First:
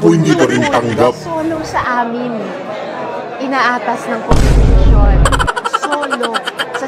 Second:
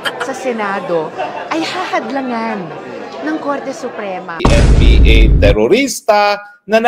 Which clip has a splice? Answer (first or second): second